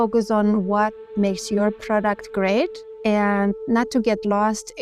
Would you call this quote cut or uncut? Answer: cut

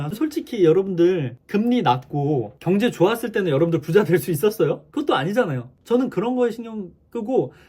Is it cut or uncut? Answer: cut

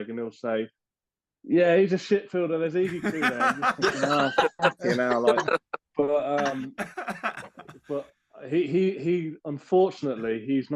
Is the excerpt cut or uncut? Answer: uncut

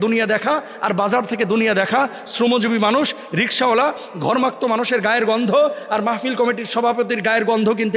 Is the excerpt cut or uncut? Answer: uncut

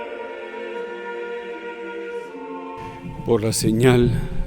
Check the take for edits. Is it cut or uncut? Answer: cut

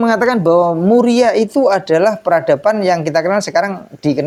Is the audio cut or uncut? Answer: uncut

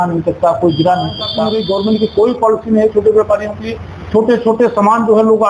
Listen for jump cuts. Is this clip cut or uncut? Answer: cut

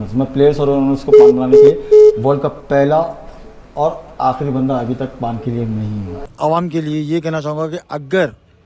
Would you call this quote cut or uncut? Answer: cut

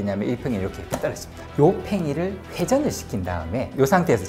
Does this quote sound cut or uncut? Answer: cut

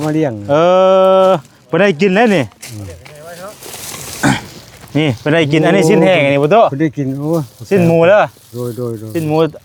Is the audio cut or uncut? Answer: uncut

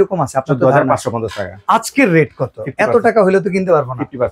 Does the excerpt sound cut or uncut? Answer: uncut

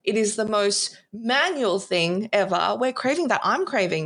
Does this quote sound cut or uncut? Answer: uncut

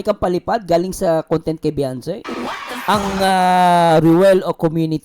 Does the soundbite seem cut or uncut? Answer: cut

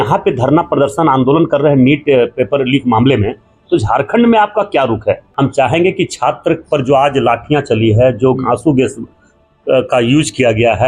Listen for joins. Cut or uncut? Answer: cut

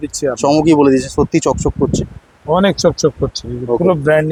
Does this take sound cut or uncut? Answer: uncut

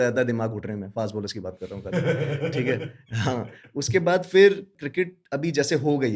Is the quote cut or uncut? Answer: uncut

